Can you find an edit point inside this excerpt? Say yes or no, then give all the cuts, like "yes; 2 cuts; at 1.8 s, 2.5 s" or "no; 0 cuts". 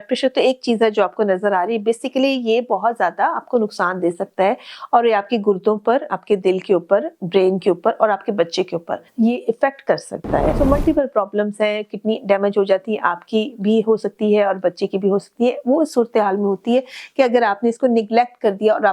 yes; 2 cuts; at 9.0 s, 10.6 s